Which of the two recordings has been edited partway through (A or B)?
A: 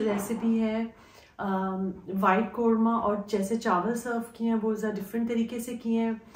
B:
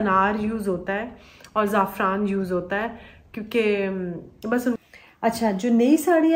B